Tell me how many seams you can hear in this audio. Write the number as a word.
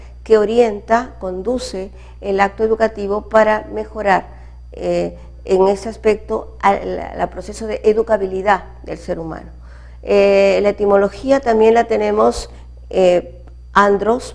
one